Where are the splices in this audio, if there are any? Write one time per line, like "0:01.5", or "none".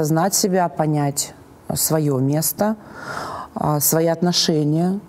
none